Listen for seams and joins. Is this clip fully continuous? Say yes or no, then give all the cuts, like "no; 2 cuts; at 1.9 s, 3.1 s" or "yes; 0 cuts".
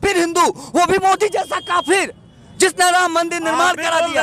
yes; 0 cuts